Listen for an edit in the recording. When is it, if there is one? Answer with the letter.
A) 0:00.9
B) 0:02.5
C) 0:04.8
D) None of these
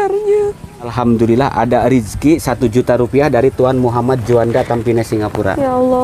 A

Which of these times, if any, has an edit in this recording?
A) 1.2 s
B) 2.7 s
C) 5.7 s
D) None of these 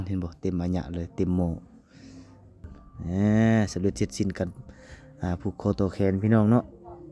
B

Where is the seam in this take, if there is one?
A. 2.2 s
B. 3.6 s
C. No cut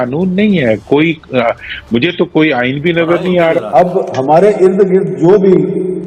B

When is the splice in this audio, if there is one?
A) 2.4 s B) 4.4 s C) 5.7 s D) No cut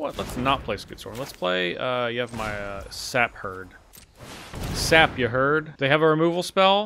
C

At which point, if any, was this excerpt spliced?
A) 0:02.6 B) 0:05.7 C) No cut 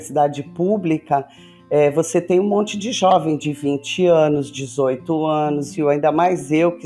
B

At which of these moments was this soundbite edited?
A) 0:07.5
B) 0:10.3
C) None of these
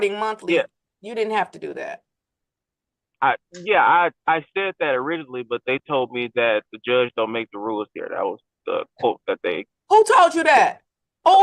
A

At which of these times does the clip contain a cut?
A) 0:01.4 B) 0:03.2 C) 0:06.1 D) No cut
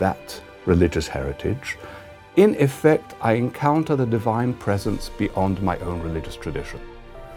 D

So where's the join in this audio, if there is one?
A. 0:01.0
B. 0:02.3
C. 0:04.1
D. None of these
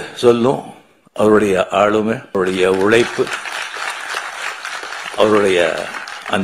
B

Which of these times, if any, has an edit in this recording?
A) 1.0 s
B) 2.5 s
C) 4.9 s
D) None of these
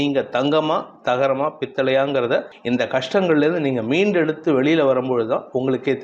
B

